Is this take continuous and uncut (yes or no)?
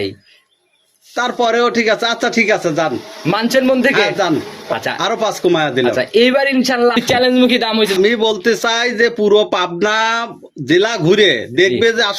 no